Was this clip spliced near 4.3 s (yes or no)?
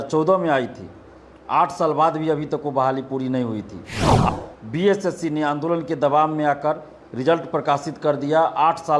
yes